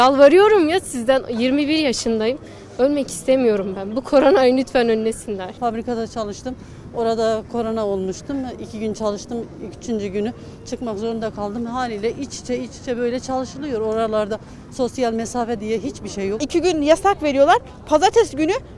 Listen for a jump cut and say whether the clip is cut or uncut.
cut